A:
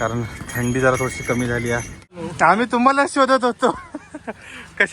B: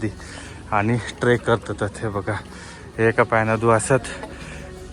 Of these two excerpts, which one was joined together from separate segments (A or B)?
A